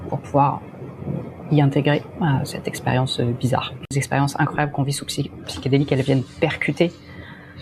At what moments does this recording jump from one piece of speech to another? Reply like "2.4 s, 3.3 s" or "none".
3.9 s